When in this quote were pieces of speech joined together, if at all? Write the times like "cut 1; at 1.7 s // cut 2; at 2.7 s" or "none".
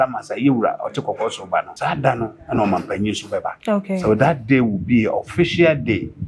cut 1; at 1.7 s // cut 2; at 3.5 s